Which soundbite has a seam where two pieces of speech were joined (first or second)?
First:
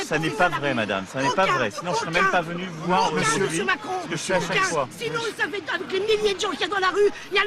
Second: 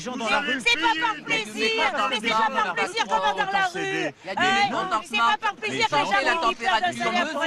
first